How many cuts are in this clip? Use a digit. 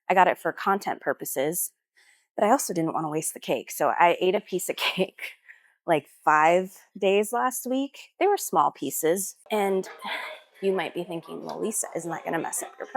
1